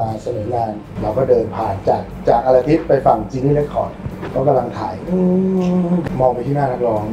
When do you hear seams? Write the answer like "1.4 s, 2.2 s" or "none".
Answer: 0.9 s, 6.1 s